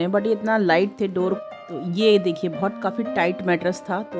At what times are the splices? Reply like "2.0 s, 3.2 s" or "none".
1.4 s

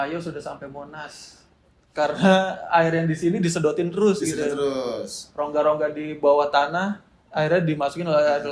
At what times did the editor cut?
none

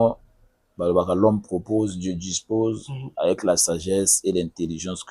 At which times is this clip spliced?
none

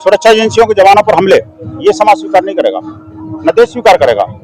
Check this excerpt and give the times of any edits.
none

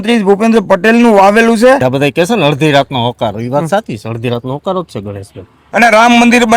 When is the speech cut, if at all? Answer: 1.8 s, 5.6 s

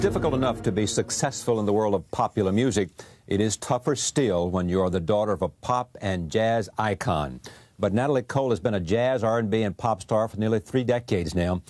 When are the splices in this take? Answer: none

